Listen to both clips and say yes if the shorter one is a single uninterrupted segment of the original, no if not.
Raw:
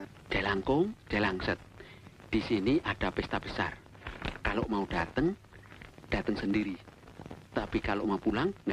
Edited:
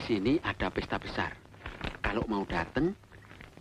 yes